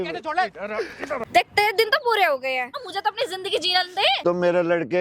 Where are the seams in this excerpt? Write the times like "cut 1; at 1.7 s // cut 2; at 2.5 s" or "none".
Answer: cut 1; at 1.2 s // cut 2; at 2.8 s // cut 3; at 4.2 s